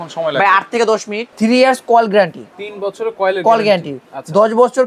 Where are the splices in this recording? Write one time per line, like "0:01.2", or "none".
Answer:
0:01.2